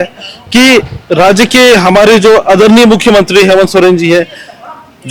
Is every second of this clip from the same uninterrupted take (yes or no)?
yes